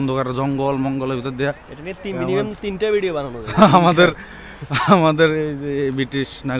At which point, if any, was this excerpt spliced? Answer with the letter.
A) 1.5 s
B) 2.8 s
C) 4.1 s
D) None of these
D